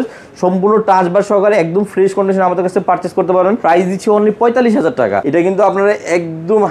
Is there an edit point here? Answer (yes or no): yes